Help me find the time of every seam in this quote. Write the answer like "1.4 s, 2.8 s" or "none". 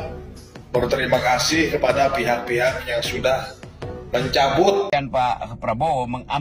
4.9 s

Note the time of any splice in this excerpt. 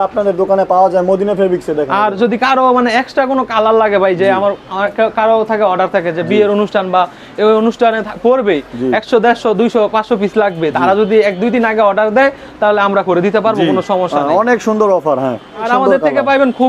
15.6 s

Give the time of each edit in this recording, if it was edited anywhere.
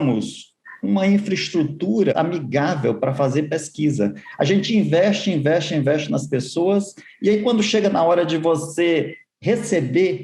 2.1 s

